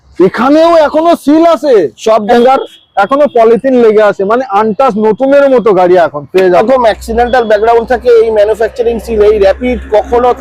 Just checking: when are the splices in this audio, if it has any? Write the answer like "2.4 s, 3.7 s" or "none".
2.3 s, 6.6 s

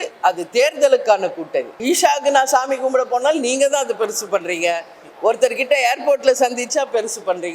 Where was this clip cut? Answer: 1.7 s

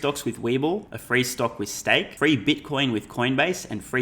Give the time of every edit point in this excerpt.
0.9 s, 2.1 s

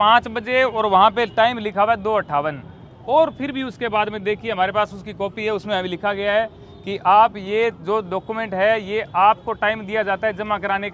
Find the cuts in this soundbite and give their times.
none

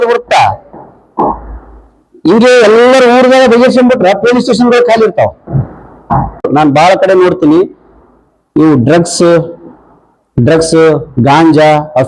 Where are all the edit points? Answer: 6.4 s

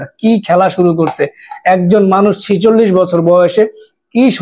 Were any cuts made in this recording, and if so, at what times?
none

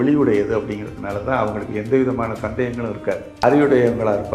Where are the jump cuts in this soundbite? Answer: 3.4 s

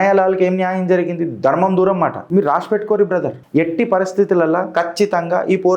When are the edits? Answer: 2.2 s, 3.4 s

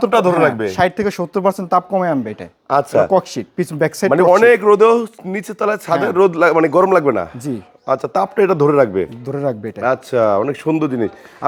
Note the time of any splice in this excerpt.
none

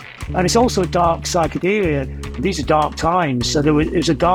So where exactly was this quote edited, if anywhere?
2.4 s

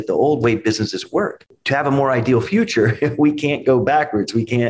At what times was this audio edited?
1.5 s

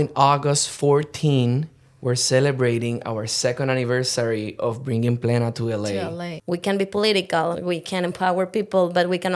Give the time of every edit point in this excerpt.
6.3 s, 7.6 s

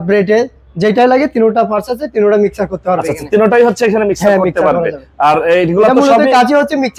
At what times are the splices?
none

